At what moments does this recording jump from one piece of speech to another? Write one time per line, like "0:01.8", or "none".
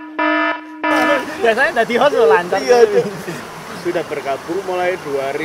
0:03.4